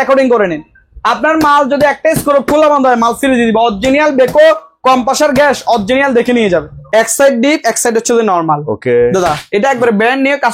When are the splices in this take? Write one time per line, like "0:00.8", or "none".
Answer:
0:06.8